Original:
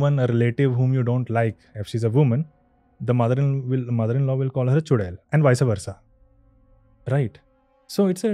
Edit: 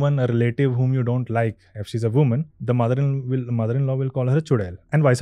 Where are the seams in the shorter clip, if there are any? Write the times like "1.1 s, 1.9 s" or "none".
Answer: 2.5 s